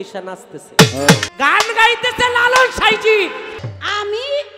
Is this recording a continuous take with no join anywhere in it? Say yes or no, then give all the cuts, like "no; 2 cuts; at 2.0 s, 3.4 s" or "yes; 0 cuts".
no; 2 cuts; at 1.3 s, 3.7 s